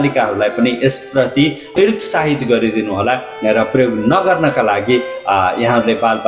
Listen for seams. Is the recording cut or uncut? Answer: cut